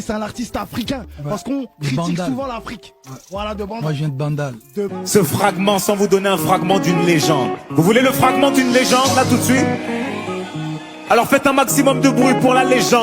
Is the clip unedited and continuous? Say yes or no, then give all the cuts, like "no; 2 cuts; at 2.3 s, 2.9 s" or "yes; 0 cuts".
no; 1 cut; at 4.9 s